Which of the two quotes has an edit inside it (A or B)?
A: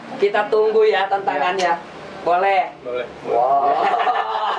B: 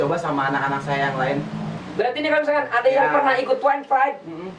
B